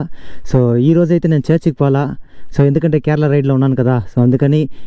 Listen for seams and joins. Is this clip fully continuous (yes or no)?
yes